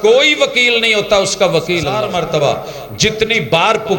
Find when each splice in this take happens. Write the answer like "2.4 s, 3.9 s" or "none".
2.0 s